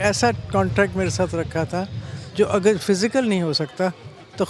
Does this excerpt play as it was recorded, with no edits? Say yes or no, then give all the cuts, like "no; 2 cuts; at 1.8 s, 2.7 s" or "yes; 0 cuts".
yes; 0 cuts